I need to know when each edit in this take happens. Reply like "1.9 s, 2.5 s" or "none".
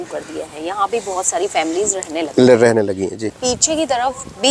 3.3 s